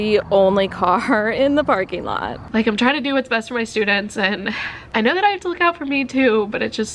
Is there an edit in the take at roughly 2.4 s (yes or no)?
yes